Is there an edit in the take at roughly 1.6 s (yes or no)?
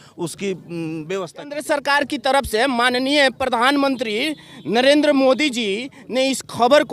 yes